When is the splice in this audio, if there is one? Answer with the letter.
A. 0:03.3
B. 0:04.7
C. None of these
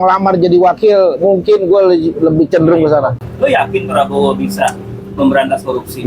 A